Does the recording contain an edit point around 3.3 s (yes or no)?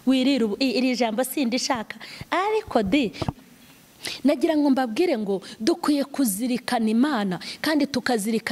yes